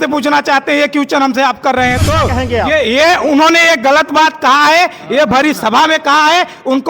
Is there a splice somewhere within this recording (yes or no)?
yes